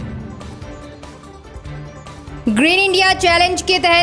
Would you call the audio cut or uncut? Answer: cut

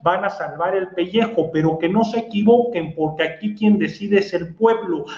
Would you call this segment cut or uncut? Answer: uncut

